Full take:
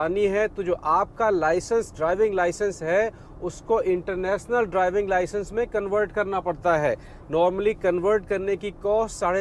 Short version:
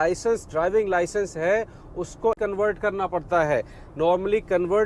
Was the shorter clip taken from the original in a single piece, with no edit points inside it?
no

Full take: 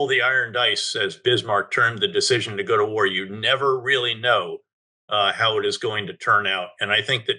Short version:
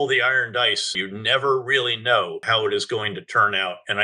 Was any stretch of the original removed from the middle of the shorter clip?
yes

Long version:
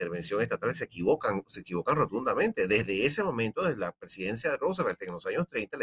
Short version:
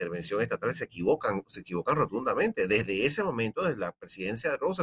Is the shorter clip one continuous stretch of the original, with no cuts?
yes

